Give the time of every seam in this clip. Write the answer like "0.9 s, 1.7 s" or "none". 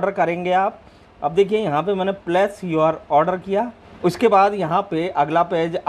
3.8 s